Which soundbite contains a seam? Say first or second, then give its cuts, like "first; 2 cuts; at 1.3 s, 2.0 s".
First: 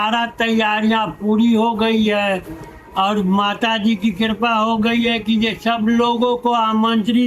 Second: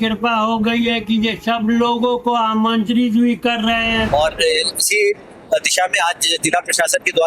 second; 1 cut; at 4.1 s